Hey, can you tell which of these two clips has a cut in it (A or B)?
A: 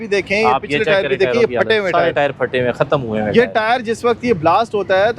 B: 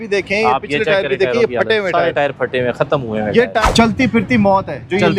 B